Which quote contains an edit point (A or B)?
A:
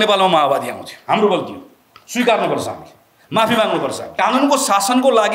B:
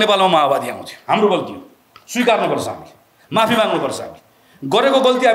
A